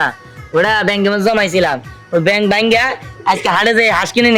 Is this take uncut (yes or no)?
yes